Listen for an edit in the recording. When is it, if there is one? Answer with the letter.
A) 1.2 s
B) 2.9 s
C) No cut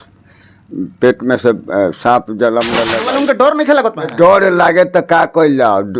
B